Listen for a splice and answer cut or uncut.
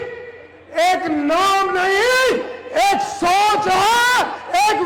uncut